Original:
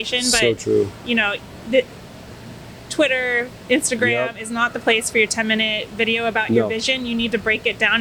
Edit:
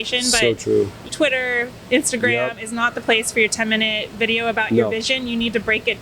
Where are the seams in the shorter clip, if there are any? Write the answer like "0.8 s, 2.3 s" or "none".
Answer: 1.0 s